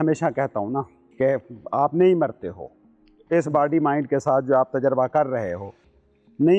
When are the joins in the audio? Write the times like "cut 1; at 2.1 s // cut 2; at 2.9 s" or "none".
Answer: cut 1; at 1.0 s